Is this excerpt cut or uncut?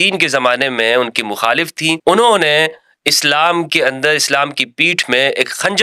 cut